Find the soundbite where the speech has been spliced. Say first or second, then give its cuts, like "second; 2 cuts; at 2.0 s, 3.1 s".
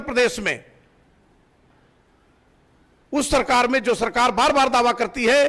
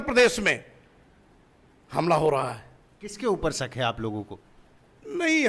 first; 1 cut; at 1.8 s